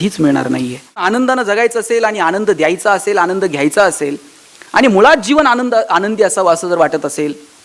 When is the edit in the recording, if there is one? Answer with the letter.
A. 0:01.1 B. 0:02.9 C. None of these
A